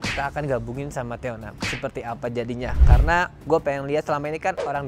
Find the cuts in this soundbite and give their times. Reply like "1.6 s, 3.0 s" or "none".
none